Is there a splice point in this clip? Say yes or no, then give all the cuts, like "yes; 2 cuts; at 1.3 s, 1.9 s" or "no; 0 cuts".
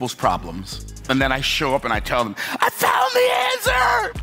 no; 0 cuts